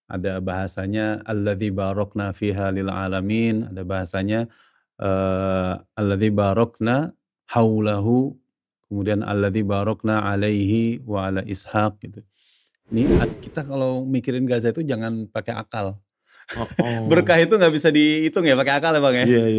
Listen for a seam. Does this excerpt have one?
yes; 1 cut; at 13.3 s

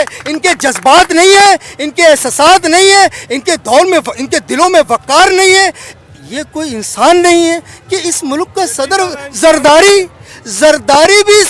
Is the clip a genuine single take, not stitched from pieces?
yes; 0 cuts

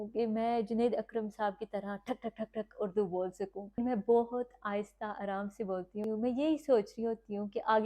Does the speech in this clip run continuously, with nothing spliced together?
no; 2 cuts; at 3.8 s, 6.0 s

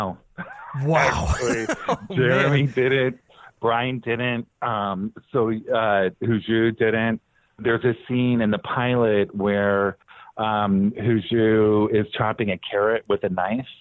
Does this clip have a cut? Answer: yes; 1 cut; at 7.6 s

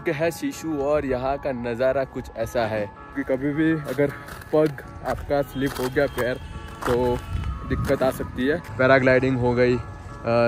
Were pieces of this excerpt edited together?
yes; 2 cuts; at 3.1 s, 8.7 s

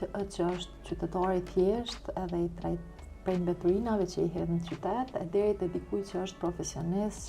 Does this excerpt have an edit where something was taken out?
no; 0 cuts

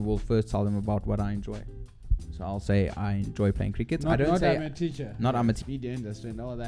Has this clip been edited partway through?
yes; 1 cut; at 5.6 s

